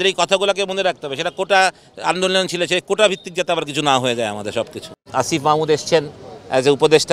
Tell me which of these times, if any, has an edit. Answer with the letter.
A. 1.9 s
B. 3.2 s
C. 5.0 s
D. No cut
C